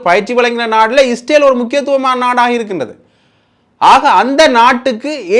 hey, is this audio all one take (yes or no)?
yes